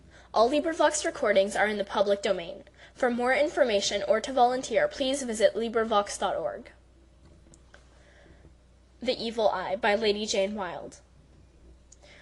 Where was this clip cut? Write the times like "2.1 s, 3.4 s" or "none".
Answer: none